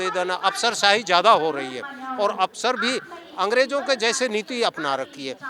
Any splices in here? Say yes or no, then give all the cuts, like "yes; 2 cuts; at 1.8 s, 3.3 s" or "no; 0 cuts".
no; 0 cuts